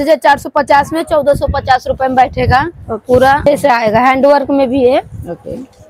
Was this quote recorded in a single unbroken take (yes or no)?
no